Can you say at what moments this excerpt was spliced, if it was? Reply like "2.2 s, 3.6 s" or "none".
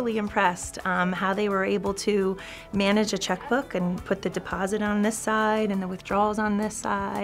none